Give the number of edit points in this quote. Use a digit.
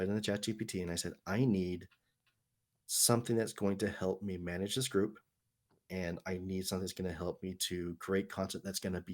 0